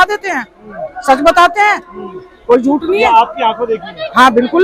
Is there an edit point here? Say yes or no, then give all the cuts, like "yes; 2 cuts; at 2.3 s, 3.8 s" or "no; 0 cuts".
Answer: no; 0 cuts